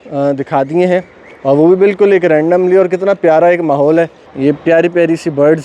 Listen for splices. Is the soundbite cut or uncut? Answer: cut